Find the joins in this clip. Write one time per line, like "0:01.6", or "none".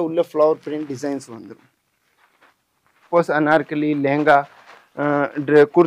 0:03.1